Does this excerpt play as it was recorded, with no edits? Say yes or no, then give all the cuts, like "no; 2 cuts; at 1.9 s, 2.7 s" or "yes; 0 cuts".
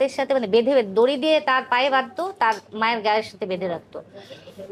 yes; 0 cuts